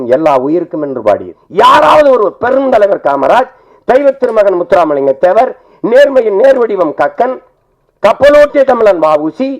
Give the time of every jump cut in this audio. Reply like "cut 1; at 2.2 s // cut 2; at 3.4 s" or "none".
cut 1; at 1.4 s